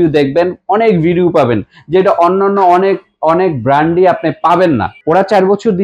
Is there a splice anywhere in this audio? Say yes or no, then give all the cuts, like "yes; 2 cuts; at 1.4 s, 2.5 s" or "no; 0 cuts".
yes; 1 cut; at 4.9 s